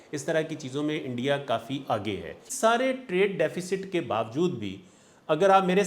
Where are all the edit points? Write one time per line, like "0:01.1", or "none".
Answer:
0:02.5

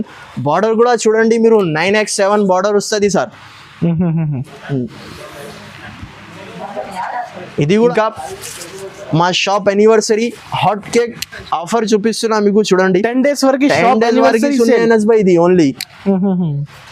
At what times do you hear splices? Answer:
0:07.9

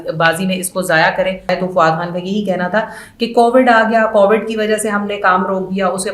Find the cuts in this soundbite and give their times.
0:01.5

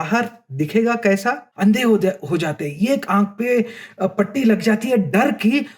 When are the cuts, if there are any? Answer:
0:01.5

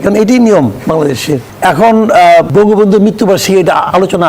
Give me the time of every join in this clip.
0:01.1
0:02.5

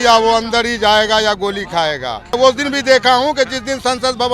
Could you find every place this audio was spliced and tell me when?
0:02.3

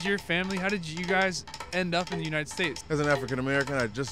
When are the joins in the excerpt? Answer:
0:02.8

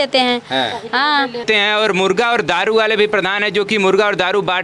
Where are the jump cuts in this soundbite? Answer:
0:01.4

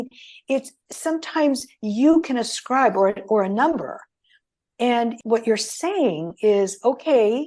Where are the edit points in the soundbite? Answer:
0:05.2

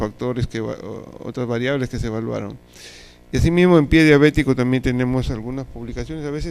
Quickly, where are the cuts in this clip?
0:01.8

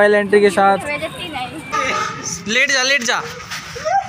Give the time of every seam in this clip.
0:01.7

